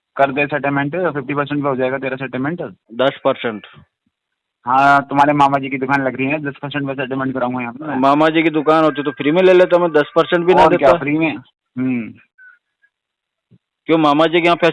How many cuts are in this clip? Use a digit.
0